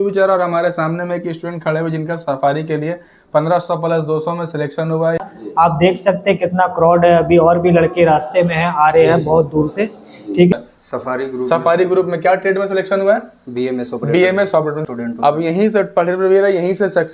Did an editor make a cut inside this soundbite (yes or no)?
yes